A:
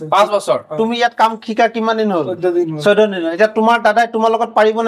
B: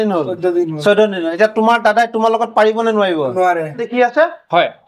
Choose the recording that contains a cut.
B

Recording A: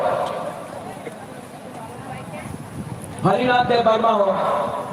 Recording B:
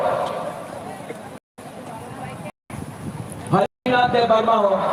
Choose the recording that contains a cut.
A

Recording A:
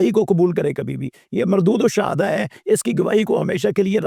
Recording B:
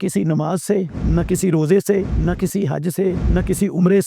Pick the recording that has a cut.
B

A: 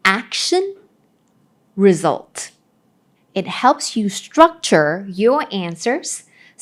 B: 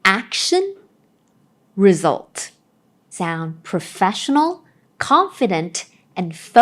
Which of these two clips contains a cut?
B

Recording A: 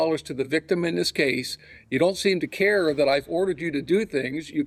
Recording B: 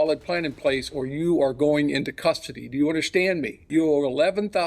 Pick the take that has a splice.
B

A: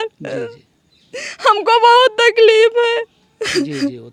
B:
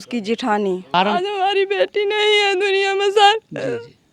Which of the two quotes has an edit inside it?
B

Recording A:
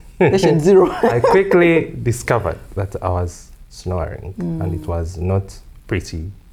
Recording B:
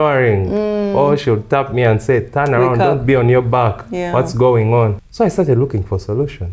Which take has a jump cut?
B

